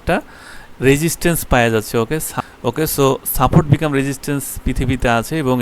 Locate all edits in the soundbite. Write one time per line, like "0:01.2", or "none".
0:02.3